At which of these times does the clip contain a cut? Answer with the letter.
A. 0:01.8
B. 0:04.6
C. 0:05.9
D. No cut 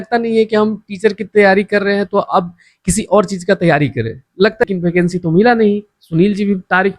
B